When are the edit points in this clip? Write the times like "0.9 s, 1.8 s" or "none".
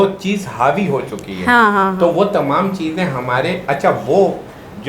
none